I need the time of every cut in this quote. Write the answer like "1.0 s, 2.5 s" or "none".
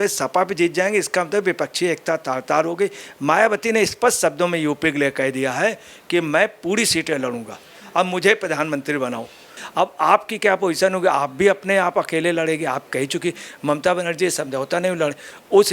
9.5 s